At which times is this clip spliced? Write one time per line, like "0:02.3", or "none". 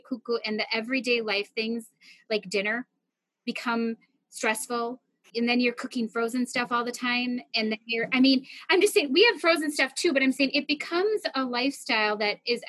none

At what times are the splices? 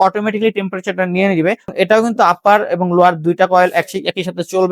0:01.7

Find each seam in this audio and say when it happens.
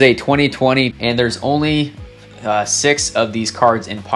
0:00.9

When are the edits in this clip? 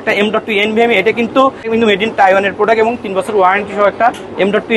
0:01.6

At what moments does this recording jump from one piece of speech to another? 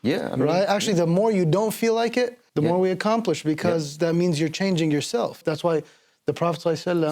0:02.4
0:05.4

